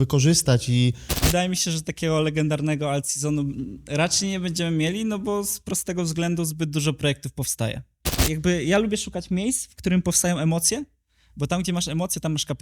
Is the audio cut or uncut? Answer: cut